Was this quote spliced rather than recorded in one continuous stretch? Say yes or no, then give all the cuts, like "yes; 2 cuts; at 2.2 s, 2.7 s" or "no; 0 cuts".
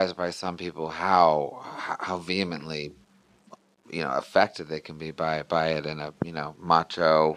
no; 0 cuts